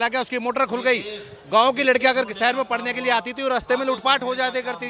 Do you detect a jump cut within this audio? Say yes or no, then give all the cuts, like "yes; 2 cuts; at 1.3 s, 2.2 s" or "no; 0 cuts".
no; 0 cuts